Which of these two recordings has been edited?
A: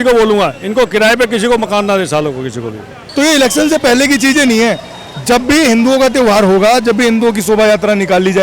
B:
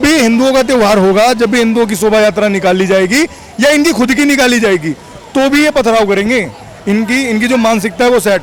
A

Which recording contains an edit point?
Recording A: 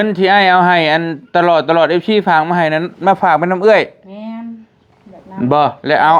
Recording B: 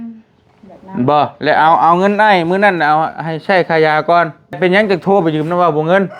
B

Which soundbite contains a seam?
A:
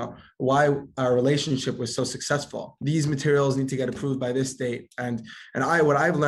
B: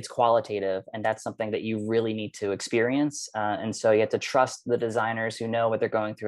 A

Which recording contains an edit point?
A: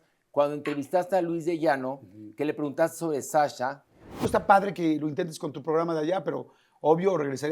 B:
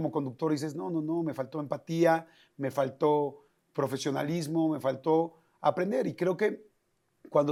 A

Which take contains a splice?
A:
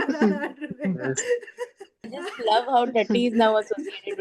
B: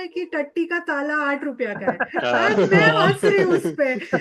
A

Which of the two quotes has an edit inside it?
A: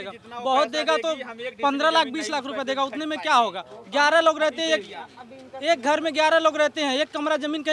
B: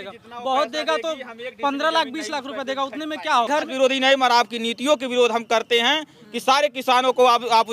B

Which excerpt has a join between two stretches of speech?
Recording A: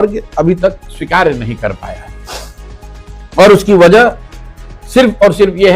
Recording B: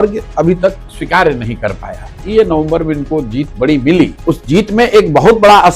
B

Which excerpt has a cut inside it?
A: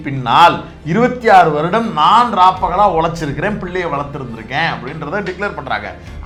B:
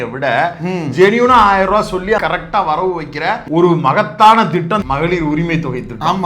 B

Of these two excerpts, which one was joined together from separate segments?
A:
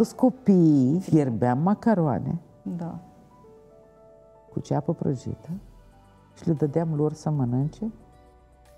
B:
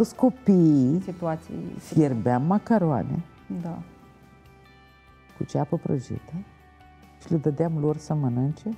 A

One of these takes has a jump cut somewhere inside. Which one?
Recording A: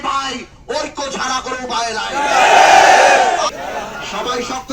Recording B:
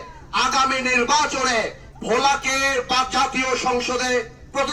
A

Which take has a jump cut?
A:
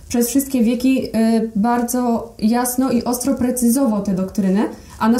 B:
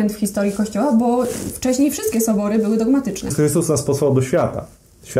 B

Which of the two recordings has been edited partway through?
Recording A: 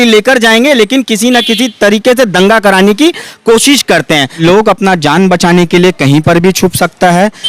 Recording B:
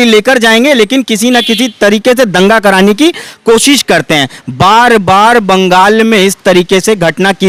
A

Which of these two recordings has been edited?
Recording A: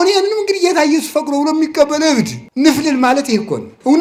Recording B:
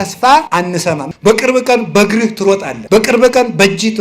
B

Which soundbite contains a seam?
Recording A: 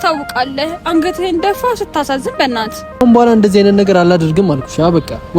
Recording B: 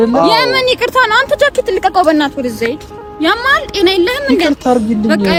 A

